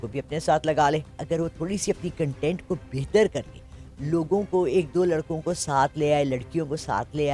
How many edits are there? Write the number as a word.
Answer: one